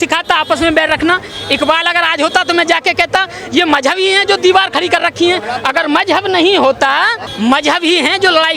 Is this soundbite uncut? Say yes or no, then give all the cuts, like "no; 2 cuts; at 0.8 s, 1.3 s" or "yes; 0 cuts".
yes; 0 cuts